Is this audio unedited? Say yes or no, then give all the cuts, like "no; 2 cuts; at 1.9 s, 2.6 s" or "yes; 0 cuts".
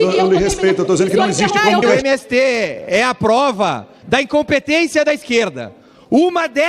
no; 1 cut; at 1.8 s